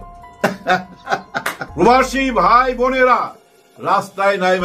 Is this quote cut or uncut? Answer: cut